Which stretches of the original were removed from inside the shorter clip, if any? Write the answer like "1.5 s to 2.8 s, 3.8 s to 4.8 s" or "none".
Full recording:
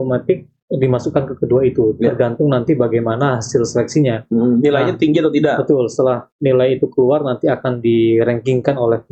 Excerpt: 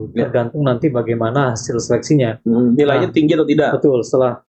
none